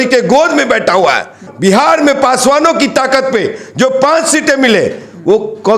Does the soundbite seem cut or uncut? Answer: cut